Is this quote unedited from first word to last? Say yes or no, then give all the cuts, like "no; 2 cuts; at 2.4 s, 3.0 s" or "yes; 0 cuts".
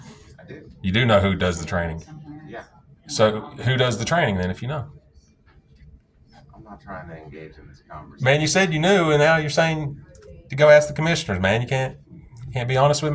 yes; 0 cuts